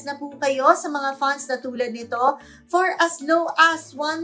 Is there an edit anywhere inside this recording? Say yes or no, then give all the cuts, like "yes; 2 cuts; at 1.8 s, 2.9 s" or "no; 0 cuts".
no; 0 cuts